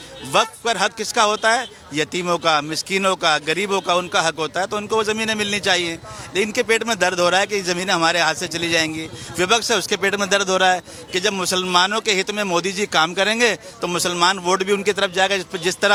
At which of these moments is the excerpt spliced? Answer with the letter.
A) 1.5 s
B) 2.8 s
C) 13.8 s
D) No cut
D